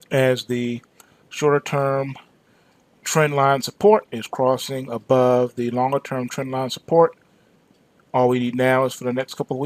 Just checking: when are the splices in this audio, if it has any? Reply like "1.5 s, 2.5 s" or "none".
4.6 s